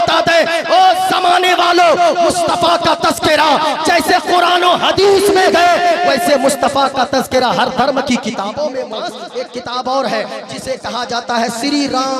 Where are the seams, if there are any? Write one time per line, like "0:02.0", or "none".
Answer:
0:09.0